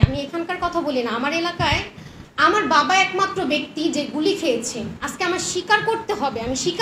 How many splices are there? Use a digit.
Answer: 0